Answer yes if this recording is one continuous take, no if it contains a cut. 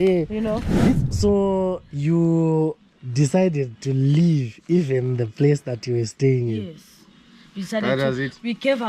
no